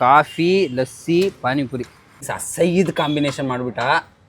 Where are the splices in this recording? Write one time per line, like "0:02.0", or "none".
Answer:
0:02.3